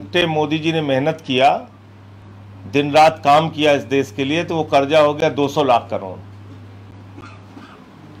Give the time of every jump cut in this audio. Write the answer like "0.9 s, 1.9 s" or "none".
none